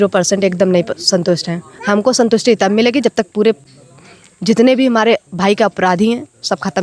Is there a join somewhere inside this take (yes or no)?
no